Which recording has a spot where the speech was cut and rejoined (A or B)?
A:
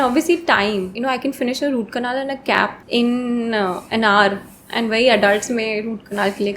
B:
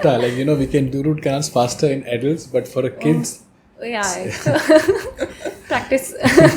A